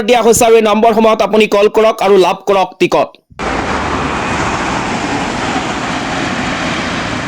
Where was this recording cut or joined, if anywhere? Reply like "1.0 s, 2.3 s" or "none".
3.2 s